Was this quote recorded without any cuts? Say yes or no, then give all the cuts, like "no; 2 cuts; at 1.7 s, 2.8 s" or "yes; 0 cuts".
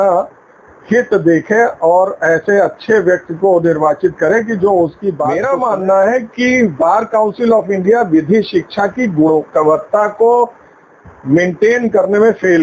no; 1 cut; at 5.3 s